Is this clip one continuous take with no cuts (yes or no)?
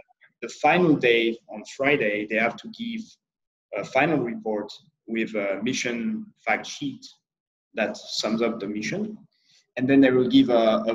yes